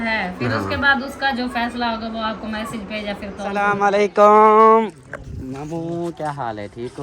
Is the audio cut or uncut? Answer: cut